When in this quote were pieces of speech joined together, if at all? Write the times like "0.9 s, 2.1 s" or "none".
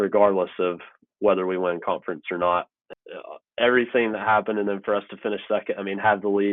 2.8 s